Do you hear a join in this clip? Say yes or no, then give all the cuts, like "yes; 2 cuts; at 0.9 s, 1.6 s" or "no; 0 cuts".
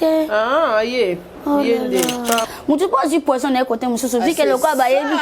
yes; 1 cut; at 2.5 s